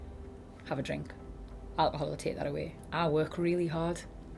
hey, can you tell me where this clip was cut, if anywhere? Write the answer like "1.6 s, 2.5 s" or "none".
2.8 s